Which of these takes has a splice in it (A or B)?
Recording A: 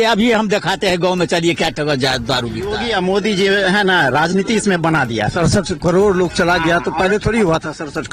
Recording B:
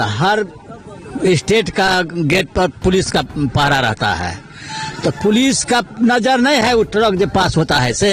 A